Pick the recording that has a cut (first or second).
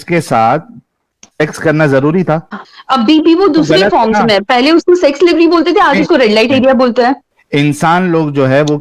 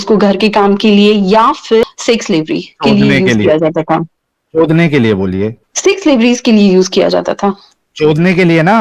first